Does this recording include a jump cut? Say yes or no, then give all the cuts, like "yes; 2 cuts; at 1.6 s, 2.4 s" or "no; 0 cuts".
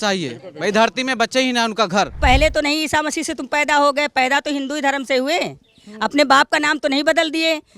yes; 1 cut; at 2.2 s